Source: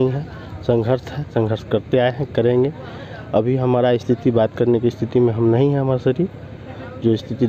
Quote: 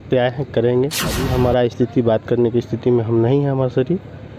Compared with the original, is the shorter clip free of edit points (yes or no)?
no